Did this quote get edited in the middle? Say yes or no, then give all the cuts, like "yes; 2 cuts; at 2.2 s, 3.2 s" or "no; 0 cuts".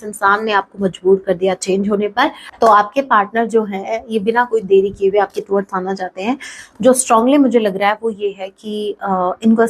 yes; 1 cut; at 2.4 s